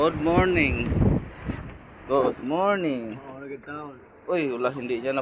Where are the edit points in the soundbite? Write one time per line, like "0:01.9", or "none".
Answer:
none

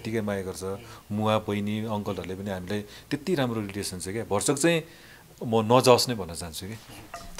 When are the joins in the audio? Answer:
none

